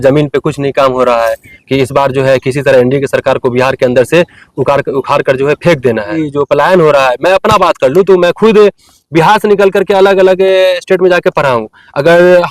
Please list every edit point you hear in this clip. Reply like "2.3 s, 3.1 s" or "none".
1.5 s, 6.2 s